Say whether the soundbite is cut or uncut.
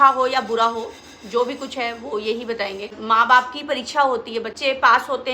cut